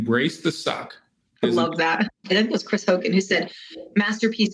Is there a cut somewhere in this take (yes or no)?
yes